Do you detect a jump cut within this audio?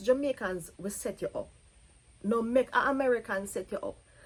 no; 0 cuts

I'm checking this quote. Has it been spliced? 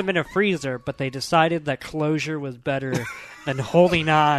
no; 0 cuts

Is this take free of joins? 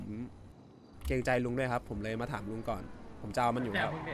yes; 0 cuts

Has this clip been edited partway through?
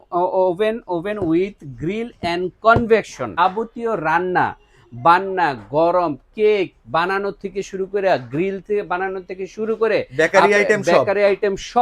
yes; 1 cut; at 3.4 s

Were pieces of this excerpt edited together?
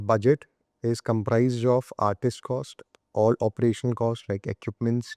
no; 0 cuts

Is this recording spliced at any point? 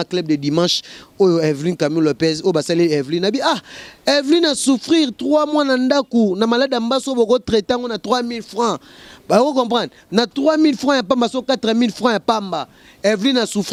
no; 0 cuts

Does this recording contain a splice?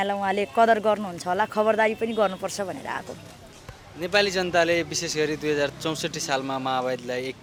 no; 0 cuts

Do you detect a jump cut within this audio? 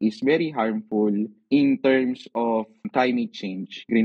yes; 2 cuts; at 1.4 s, 2.9 s

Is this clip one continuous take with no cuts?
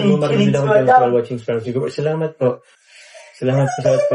no; 1 cut; at 2.6 s

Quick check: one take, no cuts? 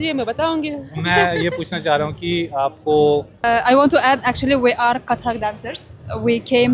no; 1 cut; at 3.4 s

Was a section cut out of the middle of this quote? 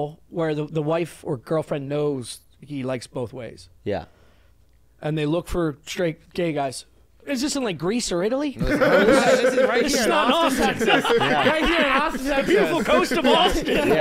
yes; 1 cut; at 7.2 s

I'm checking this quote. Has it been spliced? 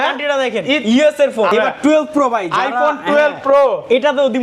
yes; 1 cut; at 1.5 s

